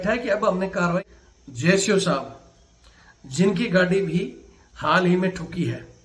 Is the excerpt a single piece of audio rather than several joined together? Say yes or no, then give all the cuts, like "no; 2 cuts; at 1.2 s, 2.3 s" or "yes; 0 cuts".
no; 1 cut; at 1.1 s